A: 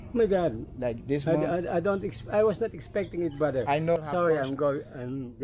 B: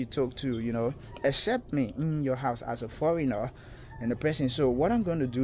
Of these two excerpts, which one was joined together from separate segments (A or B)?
A